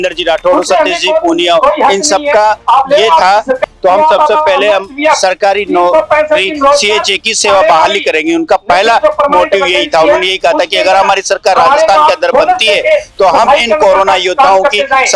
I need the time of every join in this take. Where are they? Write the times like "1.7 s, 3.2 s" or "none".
3.6 s